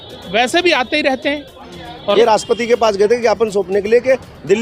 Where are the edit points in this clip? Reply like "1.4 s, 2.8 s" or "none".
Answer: 2.0 s